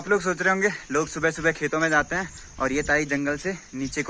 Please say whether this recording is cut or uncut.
uncut